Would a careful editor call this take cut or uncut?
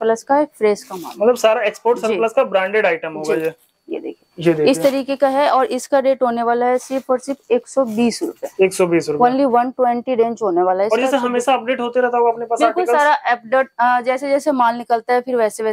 uncut